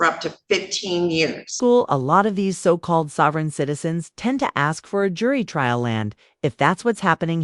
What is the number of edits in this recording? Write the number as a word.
zero